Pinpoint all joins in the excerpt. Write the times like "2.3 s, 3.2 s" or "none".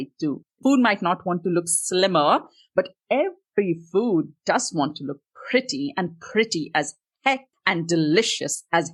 none